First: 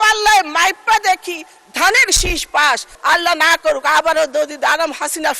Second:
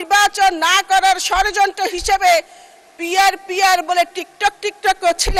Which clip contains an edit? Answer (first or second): first